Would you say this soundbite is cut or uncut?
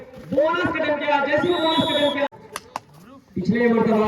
cut